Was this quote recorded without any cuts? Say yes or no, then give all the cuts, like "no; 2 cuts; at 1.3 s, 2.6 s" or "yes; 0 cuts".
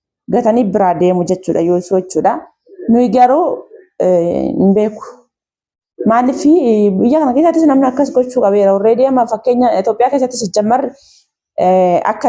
yes; 0 cuts